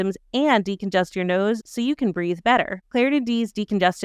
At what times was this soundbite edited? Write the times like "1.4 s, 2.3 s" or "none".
2.8 s